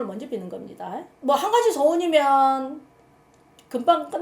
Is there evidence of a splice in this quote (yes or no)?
yes